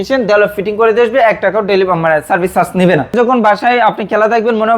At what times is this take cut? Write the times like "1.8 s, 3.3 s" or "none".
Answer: 3.1 s